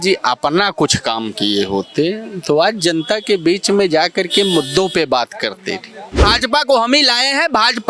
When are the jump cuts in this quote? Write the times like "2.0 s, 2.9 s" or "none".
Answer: 6.3 s